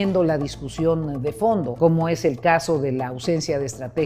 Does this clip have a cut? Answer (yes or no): yes